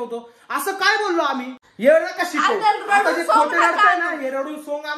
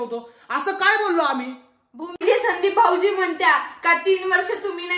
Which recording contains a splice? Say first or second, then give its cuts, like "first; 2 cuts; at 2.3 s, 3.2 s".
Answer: first; 1 cut; at 1.6 s